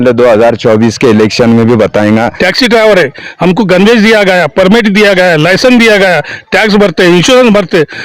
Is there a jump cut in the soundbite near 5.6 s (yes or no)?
no